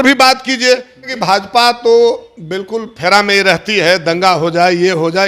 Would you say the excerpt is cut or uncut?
cut